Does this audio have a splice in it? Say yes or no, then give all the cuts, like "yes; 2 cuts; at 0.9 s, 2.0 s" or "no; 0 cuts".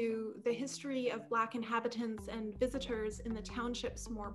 no; 0 cuts